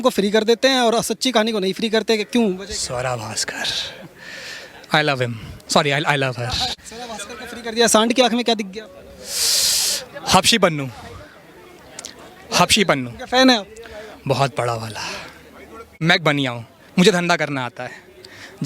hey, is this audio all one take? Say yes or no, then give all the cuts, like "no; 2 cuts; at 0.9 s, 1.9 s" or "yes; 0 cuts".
no; 2 cuts; at 6.8 s, 15.9 s